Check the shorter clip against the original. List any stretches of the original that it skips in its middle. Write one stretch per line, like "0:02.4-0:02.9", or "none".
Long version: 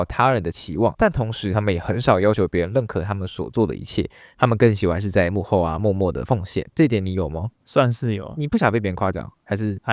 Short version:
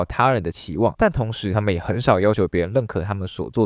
none